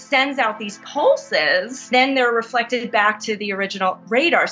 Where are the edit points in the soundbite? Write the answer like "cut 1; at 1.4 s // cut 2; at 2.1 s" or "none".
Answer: cut 1; at 1.9 s